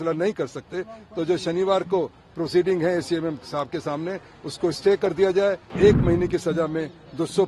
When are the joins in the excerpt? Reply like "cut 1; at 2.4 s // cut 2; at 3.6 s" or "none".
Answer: cut 1; at 5.7 s